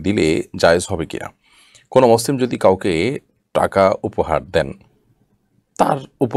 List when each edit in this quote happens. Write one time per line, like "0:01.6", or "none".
none